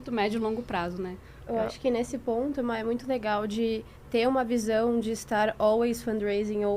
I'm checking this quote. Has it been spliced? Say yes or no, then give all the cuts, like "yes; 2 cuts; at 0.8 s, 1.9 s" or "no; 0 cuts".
no; 0 cuts